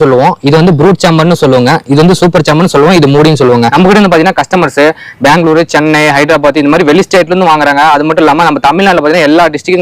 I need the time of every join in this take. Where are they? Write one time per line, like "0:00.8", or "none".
0:03.7